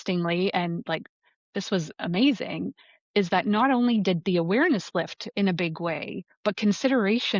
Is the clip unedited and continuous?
yes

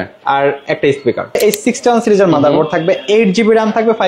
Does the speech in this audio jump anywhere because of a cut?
yes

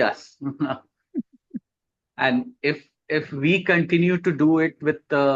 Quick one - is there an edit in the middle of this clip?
no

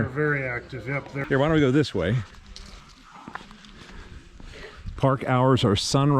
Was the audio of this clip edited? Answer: yes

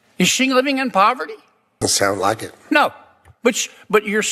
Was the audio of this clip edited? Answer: yes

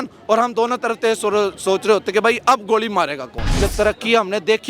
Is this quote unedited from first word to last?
no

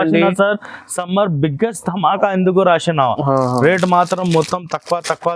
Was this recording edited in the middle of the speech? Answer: no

